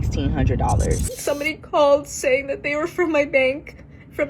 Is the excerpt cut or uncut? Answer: cut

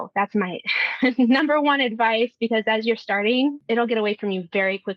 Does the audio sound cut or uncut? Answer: cut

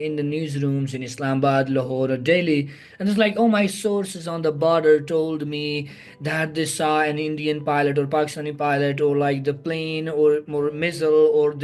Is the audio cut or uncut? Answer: uncut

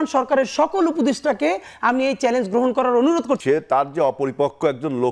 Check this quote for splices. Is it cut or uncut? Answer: cut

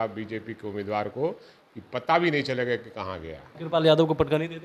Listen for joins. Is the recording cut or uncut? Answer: cut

